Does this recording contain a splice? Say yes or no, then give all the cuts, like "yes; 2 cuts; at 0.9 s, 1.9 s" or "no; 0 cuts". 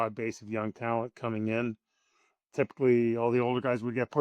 no; 0 cuts